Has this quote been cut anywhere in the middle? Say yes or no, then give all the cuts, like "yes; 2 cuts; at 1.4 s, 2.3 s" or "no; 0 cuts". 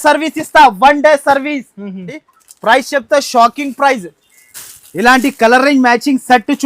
yes; 1 cut; at 2.2 s